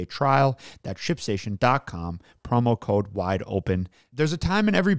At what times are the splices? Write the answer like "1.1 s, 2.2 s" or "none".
4.0 s

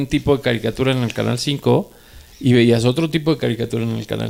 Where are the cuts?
none

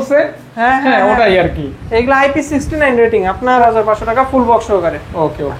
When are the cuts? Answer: 3.6 s

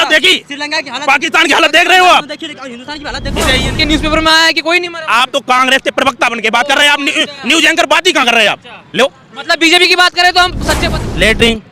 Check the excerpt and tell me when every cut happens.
3.8 s, 10.7 s

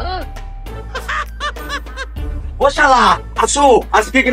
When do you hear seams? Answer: none

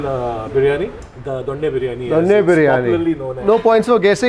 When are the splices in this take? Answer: none

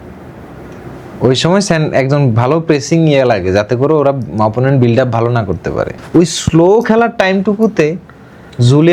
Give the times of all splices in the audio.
5.9 s

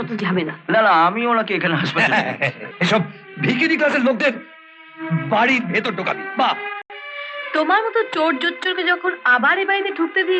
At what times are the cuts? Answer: 2.6 s

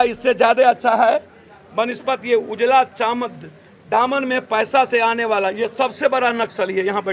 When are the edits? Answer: none

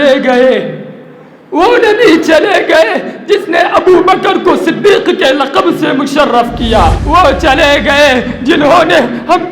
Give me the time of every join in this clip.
7.0 s

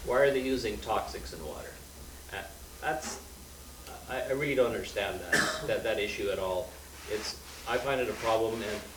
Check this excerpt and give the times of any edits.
none

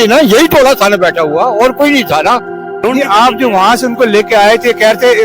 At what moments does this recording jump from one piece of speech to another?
2.7 s

